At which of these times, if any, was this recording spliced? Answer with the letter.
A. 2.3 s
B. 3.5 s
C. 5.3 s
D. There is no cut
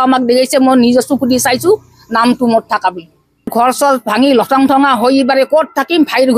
B